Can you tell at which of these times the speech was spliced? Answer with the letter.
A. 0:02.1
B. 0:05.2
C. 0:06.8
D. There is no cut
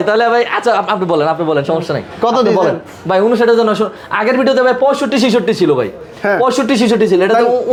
D